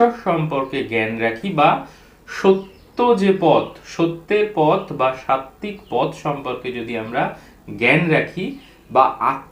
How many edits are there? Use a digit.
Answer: 0